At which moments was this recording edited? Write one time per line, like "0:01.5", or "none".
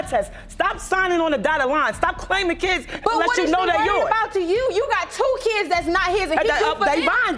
none